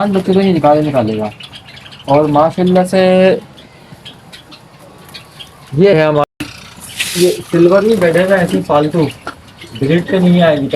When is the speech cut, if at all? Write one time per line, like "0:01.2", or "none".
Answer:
0:06.3